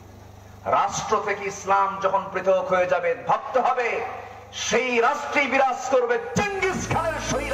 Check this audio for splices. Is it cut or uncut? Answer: uncut